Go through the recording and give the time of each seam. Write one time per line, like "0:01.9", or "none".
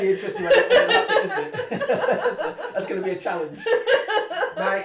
none

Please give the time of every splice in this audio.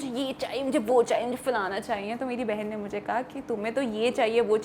none

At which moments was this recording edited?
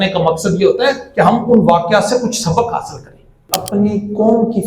0:03.5

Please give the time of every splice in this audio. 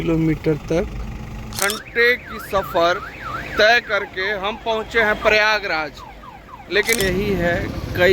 0:01.5
0:07.0

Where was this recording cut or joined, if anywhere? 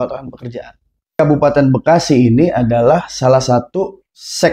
0:01.2

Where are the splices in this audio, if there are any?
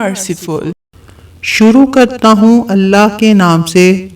0:00.9

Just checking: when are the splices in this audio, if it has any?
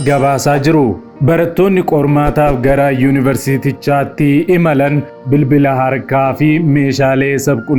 0:05.1

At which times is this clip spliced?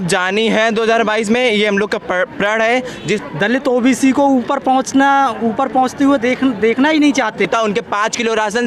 0:03.2
0:07.5

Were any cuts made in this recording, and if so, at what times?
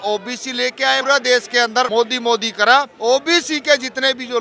0:01.0
0:01.9
0:02.9

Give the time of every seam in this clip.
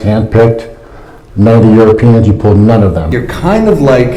0:03.2

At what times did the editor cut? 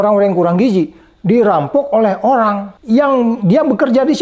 0:02.7
0:03.4

